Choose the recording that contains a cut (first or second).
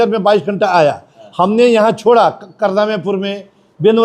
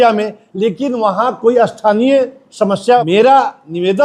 second